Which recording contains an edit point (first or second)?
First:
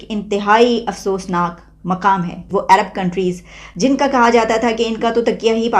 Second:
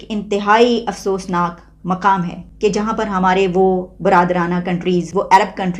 first